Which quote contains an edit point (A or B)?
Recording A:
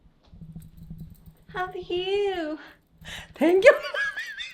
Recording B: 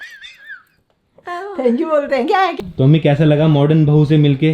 B